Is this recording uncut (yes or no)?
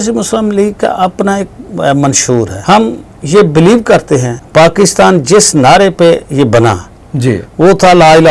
no